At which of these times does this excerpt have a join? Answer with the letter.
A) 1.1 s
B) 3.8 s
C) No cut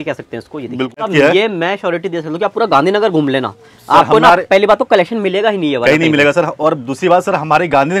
A